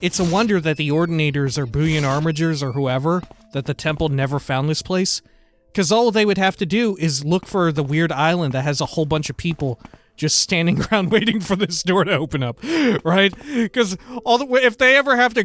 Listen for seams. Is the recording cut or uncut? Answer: uncut